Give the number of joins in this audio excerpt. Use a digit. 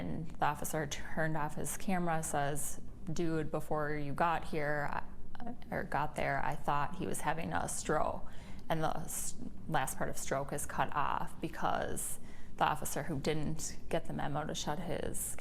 0